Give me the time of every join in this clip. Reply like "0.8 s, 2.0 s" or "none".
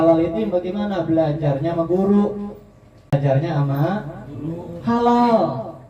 3.1 s